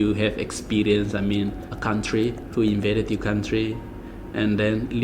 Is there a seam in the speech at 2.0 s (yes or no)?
yes